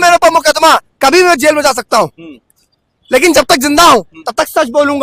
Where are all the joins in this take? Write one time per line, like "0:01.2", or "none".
none